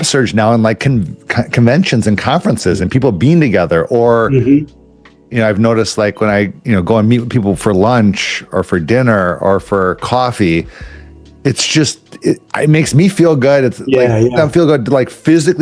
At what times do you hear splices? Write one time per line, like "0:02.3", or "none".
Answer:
0:06.6